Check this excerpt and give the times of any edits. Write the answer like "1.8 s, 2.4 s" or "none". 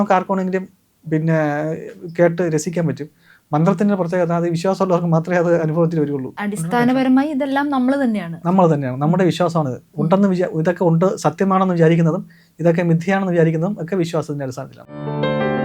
6.3 s, 14.7 s